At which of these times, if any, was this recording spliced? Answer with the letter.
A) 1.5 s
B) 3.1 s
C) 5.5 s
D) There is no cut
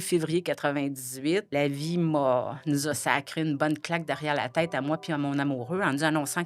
A